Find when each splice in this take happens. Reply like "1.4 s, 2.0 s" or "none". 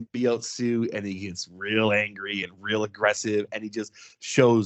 none